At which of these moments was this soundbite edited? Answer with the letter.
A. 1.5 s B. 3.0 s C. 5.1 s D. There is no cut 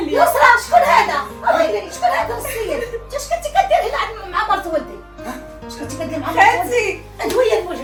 D